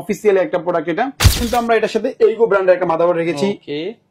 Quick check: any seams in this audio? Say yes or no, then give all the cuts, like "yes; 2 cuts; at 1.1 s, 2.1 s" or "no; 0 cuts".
yes; 1 cut; at 1.4 s